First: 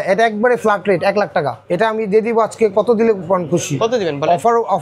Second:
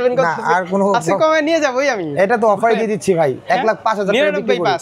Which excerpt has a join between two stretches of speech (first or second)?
first